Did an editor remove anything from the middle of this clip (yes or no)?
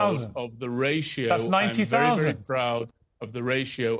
no